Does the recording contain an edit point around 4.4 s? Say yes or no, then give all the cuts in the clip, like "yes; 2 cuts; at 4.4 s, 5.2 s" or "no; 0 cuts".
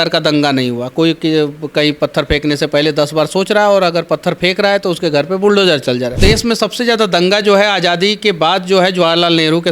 no; 1 cut; at 6.2 s